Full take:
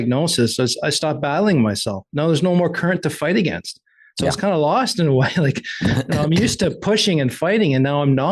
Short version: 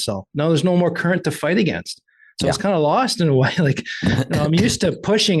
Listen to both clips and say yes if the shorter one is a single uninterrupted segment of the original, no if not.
yes